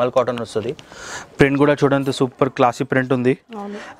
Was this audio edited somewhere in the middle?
no; 0 cuts

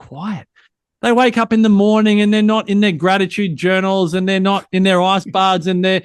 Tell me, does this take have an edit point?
no; 0 cuts

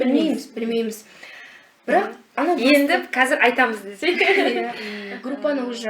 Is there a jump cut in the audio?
yes; 1 cut; at 4.8 s

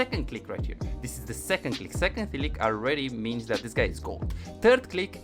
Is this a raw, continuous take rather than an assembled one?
yes; 0 cuts

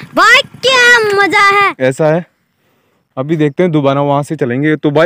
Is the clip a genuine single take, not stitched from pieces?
no; 1 cut; at 1.7 s

